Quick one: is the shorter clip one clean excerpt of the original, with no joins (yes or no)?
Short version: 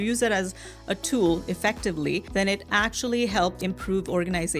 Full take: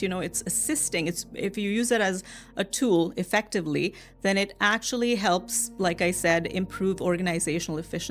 no